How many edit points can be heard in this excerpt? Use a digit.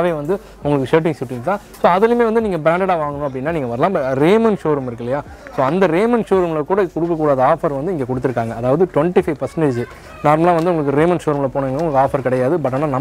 0